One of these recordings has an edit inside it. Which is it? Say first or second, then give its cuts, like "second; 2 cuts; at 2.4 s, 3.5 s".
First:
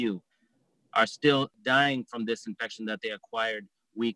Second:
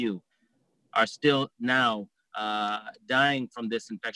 first; 1 cut; at 1.5 s